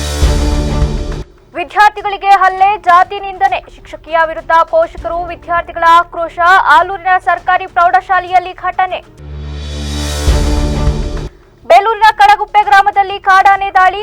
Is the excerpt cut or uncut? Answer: cut